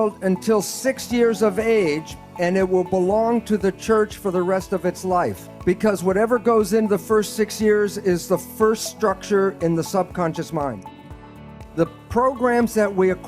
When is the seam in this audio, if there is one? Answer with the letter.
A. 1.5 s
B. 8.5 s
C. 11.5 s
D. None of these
C